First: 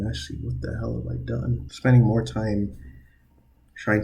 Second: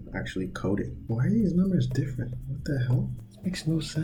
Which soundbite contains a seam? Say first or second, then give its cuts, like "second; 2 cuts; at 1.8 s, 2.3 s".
first; 1 cut; at 1.7 s